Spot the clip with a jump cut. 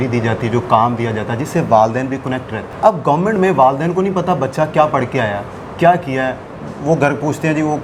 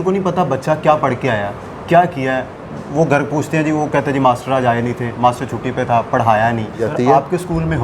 second; 1 cut; at 6.9 s

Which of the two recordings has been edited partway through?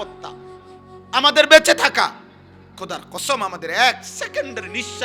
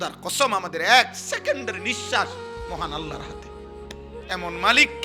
second; 2 cuts; at 3.2 s, 4.3 s

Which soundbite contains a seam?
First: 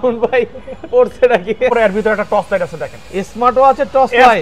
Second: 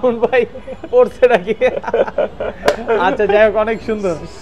first; 1 cut; at 1.7 s

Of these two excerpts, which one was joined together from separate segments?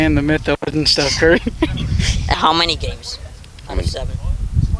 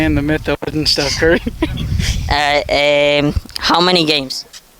first; 1 cut; at 2.4 s

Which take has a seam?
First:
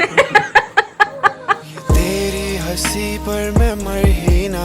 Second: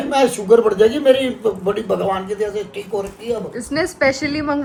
first; 1 cut; at 1.7 s

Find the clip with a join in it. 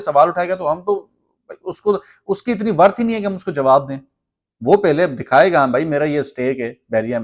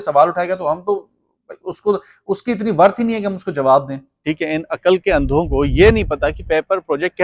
second; 1 cut; at 4.1 s

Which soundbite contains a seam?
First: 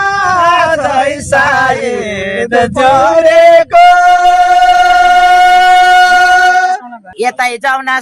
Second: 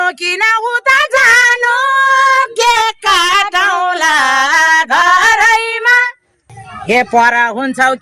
first; 1 cut; at 7.0 s

